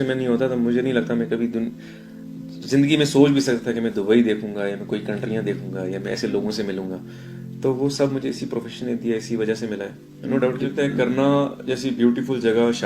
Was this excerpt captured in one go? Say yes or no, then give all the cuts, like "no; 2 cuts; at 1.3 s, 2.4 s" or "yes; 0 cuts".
no; 1 cut; at 10.7 s